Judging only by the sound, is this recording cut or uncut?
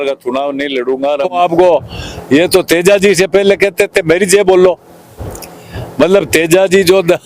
cut